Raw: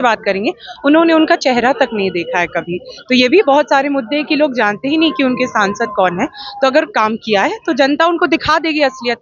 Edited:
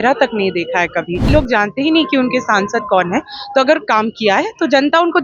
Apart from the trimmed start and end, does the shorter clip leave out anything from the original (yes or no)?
yes